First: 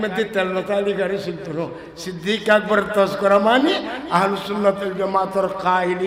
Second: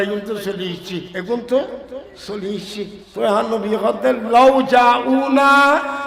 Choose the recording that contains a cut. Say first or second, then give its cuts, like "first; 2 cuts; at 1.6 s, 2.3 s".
second; 2 cuts; at 1.1 s, 3.0 s